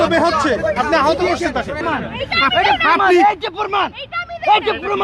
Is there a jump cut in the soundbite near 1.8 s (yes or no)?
yes